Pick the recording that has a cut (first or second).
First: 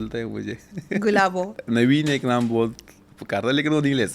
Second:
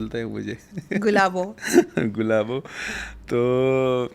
first